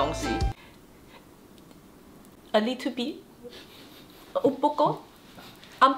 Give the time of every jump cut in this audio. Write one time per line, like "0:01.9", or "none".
none